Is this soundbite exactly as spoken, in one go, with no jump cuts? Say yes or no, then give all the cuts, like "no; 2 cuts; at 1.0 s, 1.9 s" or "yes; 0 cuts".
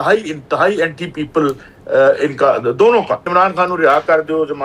no; 1 cut; at 3.2 s